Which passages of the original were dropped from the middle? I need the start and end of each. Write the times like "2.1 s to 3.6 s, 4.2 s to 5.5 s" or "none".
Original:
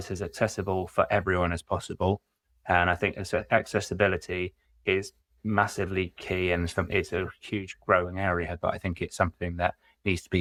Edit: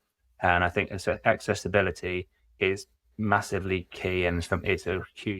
none